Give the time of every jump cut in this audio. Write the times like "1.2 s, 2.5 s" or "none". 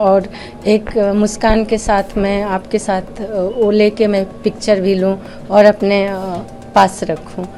none